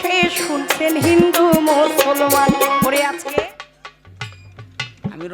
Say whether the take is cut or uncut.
cut